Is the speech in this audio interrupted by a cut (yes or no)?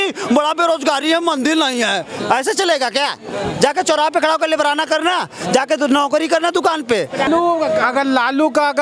yes